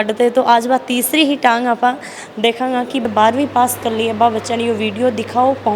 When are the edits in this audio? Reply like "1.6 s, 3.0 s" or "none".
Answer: 3.0 s